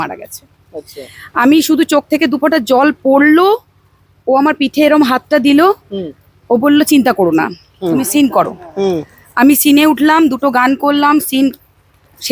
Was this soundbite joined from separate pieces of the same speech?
no; 0 cuts

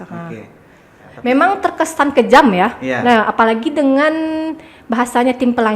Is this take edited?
yes; 1 cut; at 1.1 s

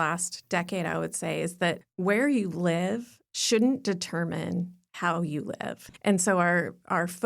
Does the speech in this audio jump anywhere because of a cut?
yes; 2 cuts; at 1.9 s, 5.9 s

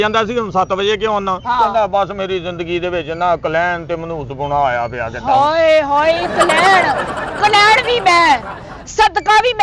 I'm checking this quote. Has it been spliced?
no; 0 cuts

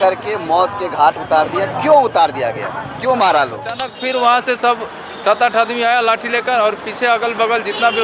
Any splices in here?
yes; 1 cut; at 3.9 s

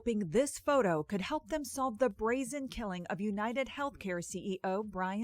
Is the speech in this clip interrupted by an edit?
no; 0 cuts

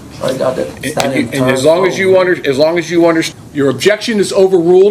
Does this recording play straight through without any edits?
no; 1 cut; at 3.3 s

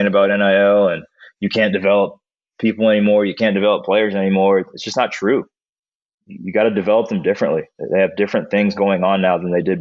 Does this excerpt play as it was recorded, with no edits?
yes; 0 cuts

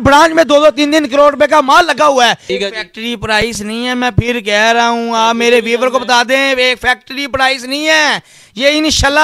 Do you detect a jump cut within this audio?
yes; 1 cut; at 2.4 s

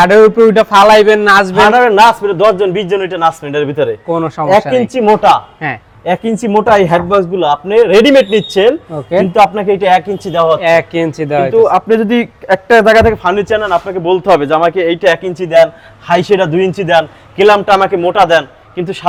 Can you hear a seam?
no; 0 cuts

